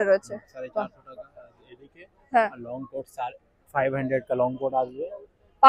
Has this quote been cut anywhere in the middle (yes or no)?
no